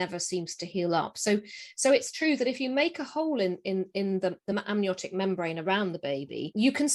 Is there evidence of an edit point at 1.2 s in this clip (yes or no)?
no